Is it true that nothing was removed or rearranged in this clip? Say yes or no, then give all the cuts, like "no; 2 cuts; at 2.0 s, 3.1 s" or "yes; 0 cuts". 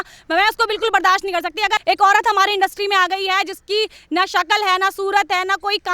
no; 1 cut; at 1.8 s